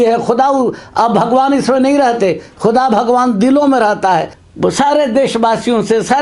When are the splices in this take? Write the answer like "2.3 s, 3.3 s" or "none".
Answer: 4.4 s

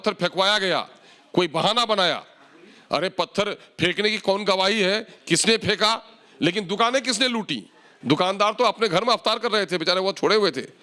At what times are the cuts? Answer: none

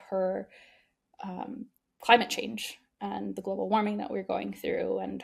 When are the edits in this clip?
1.8 s

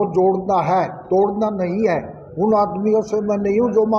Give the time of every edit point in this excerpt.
none

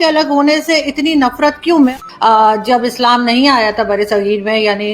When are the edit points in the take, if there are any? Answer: 1.9 s

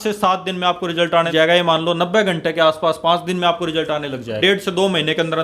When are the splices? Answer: 1.3 s, 4.4 s

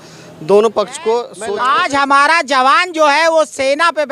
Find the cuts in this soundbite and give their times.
1.3 s

